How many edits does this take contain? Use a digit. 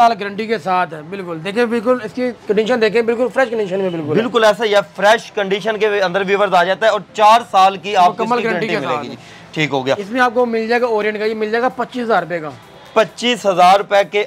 0